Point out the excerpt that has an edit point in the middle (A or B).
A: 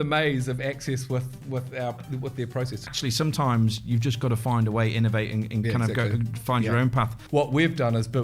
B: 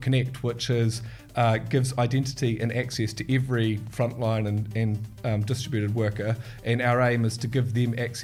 A